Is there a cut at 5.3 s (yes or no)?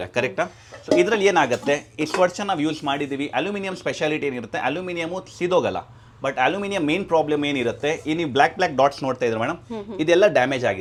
no